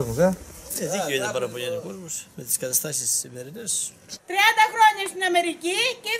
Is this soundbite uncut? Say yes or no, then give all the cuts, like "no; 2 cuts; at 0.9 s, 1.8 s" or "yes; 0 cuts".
no; 1 cut; at 4.2 s